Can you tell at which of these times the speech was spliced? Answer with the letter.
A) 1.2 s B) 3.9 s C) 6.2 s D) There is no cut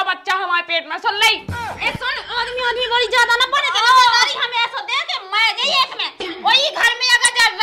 C